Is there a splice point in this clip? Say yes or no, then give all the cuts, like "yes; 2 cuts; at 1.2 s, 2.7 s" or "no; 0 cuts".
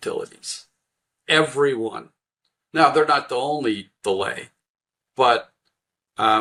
no; 0 cuts